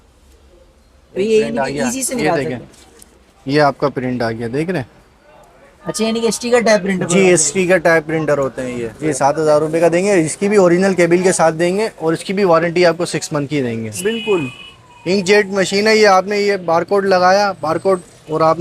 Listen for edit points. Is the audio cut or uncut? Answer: cut